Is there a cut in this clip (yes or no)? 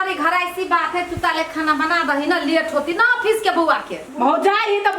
yes